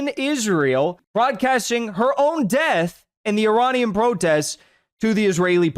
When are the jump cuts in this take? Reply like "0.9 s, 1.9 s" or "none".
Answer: 1.0 s